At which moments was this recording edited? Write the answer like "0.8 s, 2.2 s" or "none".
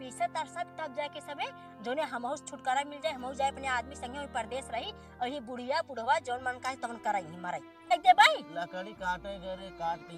7.9 s